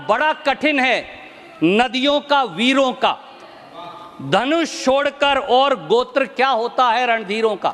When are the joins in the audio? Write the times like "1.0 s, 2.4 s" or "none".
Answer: none

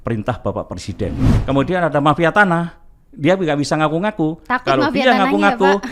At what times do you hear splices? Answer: 1.3 s

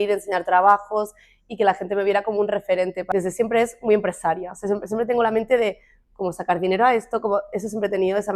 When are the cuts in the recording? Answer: 3.1 s

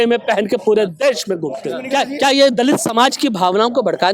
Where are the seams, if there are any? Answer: 1.7 s

